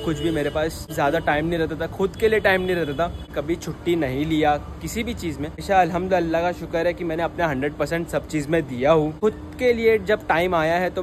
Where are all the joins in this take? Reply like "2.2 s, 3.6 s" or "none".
0.9 s, 3.3 s, 5.6 s, 9.1 s